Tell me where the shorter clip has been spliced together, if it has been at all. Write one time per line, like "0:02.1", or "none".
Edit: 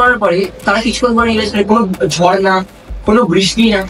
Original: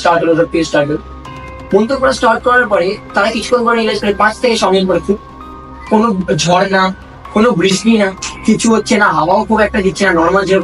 0:01.7